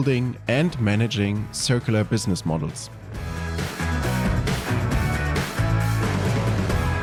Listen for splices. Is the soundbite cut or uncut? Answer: uncut